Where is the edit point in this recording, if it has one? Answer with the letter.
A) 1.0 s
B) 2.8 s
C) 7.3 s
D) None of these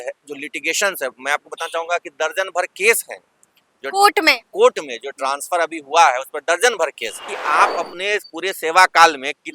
C